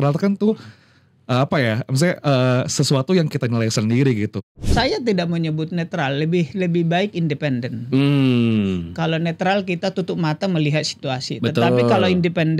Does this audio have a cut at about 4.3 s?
yes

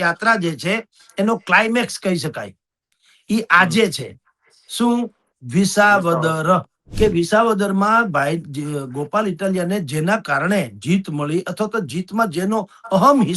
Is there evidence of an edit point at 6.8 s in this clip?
yes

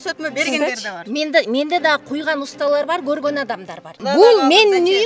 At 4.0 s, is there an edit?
yes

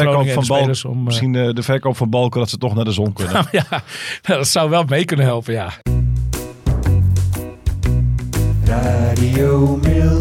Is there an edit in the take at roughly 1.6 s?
no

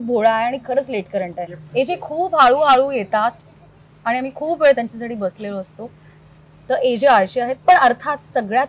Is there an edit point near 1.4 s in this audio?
yes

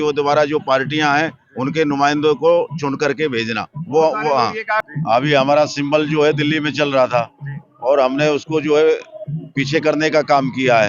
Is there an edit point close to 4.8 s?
yes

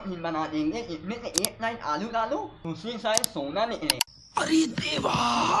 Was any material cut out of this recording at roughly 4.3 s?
yes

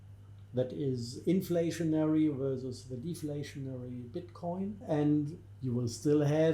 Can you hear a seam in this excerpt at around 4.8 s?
yes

